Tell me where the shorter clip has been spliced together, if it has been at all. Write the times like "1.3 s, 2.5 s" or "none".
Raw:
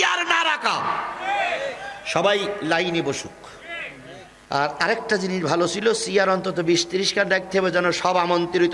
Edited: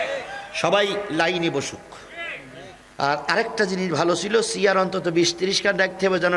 none